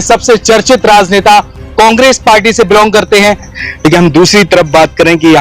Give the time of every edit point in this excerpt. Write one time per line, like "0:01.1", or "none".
0:03.5